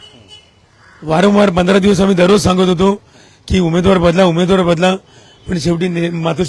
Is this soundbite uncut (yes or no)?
yes